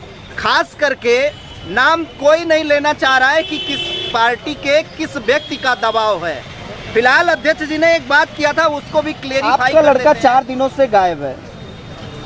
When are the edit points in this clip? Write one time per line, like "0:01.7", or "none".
0:09.5